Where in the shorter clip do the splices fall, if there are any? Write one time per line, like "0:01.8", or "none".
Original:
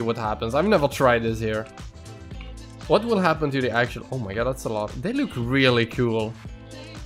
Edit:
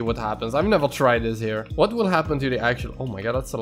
0:01.7